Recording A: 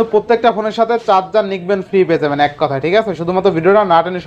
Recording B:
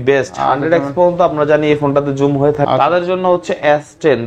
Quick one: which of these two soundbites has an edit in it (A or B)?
B